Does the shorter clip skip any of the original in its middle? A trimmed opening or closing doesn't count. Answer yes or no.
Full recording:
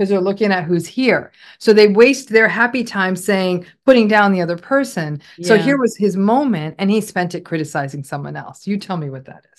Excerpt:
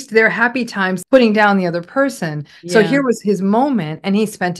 yes